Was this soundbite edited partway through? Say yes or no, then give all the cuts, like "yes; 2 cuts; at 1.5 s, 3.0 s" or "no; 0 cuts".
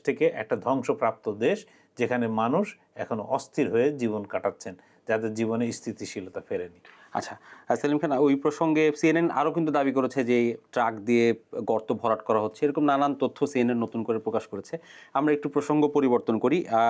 no; 0 cuts